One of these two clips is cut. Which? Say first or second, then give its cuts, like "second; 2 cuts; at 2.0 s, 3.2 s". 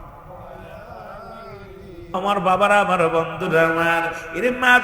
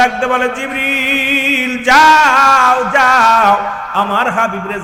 first; 1 cut; at 2.2 s